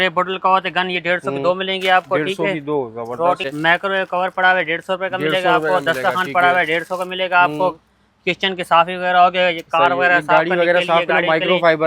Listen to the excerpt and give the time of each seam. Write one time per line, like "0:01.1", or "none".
0:03.5